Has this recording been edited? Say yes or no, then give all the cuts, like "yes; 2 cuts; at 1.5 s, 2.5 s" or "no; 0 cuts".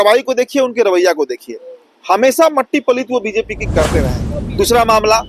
yes; 1 cut; at 4.2 s